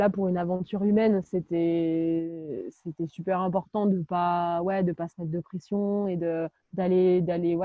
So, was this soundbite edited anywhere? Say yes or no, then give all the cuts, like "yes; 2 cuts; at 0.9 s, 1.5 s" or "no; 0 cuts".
no; 0 cuts